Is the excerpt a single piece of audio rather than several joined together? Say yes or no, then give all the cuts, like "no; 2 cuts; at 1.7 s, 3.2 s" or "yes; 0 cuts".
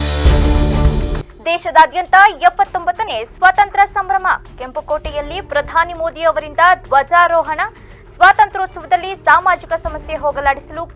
no; 1 cut; at 1.2 s